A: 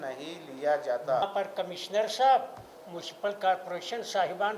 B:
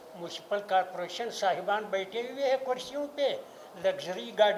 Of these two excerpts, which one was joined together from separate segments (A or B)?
A